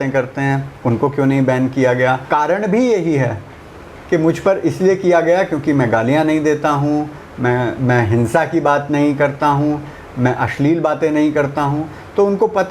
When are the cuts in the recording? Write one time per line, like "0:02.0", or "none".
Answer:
0:02.2